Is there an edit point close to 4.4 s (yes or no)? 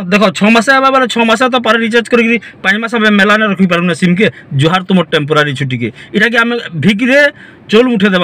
yes